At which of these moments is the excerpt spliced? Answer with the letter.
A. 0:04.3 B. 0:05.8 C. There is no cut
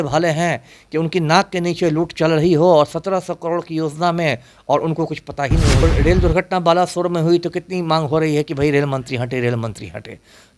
B